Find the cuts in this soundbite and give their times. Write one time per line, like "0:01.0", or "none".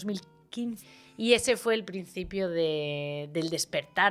0:00.9